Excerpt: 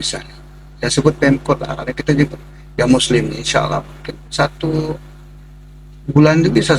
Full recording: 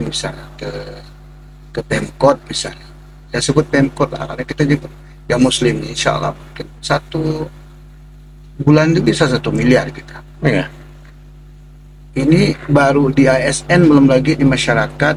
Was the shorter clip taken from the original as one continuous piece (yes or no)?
yes